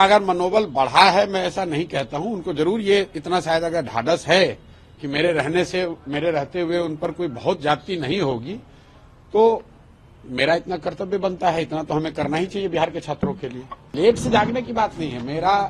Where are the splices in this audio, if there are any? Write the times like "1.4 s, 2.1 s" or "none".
13.9 s

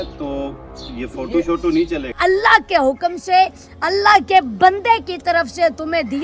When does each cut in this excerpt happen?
2.2 s

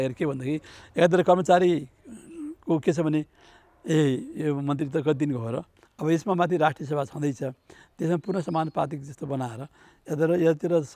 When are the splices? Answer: 5.8 s

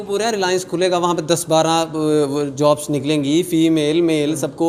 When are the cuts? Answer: none

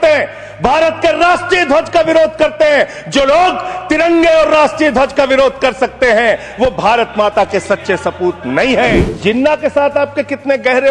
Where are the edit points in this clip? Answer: 9.1 s

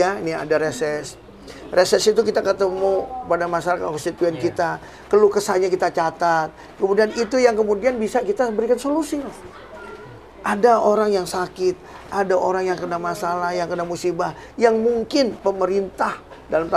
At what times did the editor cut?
none

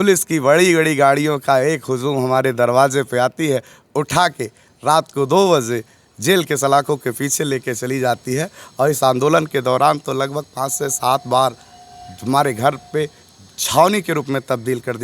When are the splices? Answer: none

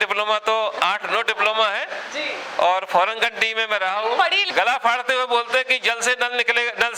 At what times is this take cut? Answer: 4.4 s

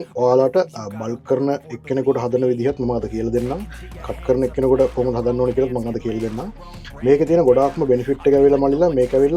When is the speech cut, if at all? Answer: none

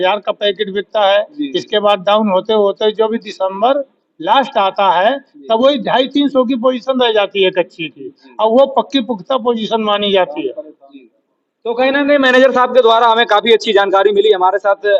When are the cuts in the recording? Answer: none

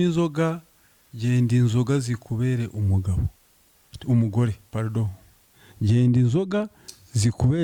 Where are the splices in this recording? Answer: none

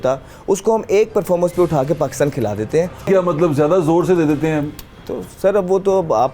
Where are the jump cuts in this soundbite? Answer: 3.1 s

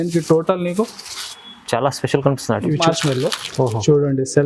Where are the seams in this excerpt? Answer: 2.8 s

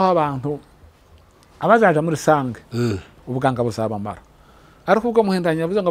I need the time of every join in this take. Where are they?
none

